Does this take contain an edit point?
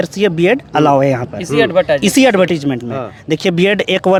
no; 0 cuts

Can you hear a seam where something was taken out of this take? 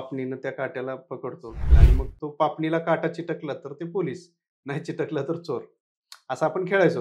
yes; 1 cut; at 1.8 s

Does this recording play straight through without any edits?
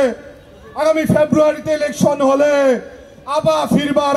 yes; 0 cuts

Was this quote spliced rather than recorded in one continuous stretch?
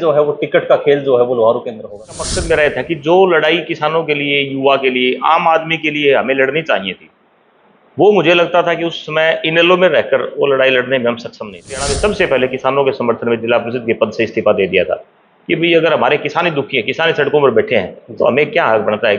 yes; 2 cuts; at 2.3 s, 11.9 s

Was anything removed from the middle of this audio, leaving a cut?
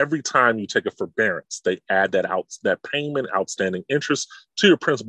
no; 0 cuts

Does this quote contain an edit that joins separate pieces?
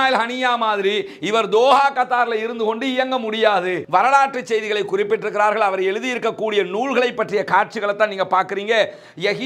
yes; 1 cut; at 3.8 s

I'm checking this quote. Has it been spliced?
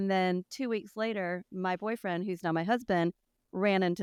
no; 0 cuts

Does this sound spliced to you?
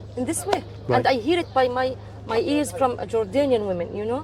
no; 0 cuts

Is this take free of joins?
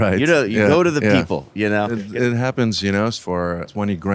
no; 2 cuts; at 1.9 s, 3.2 s

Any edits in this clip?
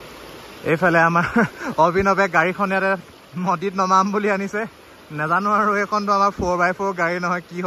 no; 0 cuts

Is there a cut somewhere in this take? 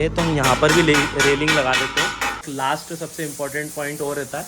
yes; 1 cut; at 2.4 s

